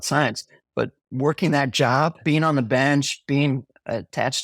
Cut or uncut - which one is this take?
cut